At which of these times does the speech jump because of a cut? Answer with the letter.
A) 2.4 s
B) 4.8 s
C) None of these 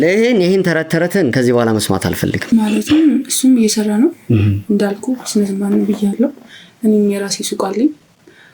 A